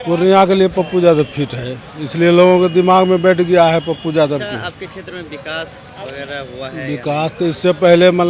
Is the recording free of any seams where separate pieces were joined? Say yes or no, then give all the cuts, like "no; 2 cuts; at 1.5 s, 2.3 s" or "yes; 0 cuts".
yes; 0 cuts